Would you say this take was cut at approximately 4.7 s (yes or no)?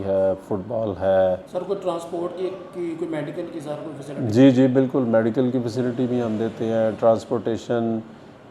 no